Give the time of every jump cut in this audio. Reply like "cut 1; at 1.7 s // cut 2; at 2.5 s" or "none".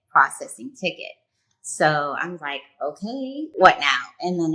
cut 1; at 3.5 s